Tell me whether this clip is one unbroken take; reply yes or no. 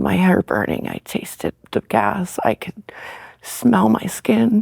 yes